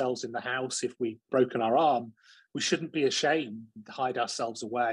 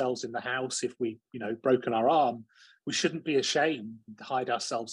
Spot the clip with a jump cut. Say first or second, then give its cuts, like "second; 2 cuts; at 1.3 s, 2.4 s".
first; 1 cut; at 1.3 s